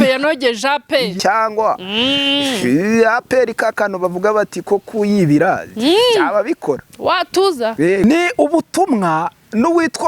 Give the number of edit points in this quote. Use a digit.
2